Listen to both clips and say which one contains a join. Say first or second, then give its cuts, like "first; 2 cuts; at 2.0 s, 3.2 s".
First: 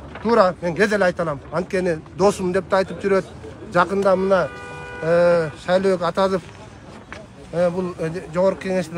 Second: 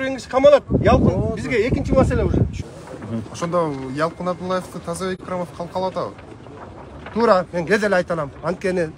second; 1 cut; at 2.6 s